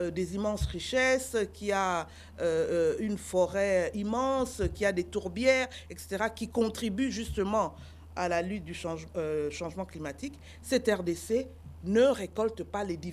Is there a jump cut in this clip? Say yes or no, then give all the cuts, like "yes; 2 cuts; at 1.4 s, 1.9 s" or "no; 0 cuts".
no; 0 cuts